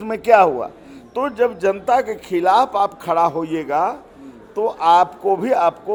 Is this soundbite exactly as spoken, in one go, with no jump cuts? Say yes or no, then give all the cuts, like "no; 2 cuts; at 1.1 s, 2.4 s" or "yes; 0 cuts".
yes; 0 cuts